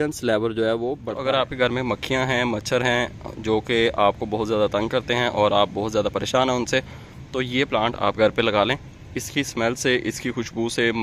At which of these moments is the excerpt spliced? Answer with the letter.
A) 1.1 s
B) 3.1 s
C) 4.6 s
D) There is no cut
A